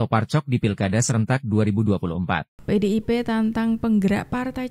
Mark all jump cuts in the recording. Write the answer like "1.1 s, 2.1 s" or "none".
2.5 s

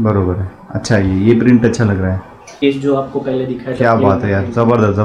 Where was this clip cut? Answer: 2.6 s

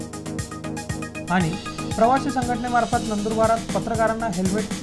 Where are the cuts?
0.9 s

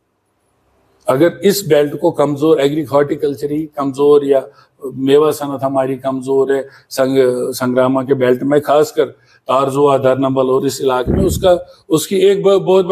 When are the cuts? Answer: none

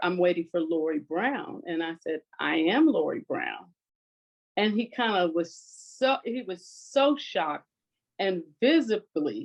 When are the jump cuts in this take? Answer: none

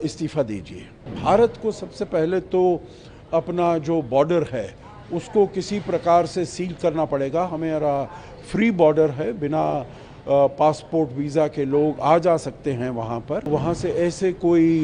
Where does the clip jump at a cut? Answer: 1.1 s, 13.5 s

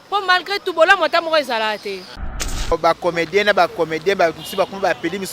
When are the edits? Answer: 2.6 s

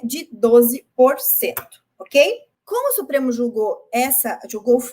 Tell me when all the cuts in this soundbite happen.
2.5 s

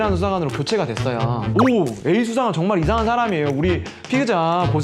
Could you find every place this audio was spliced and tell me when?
1.5 s

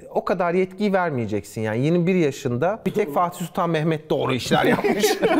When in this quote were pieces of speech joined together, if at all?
none

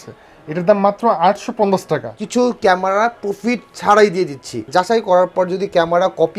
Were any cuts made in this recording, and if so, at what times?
2.1 s, 4.5 s

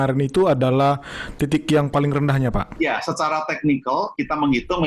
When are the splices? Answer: 2.7 s

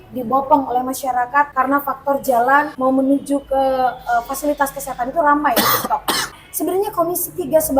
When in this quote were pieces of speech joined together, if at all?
1.5 s, 2.7 s, 6.3 s

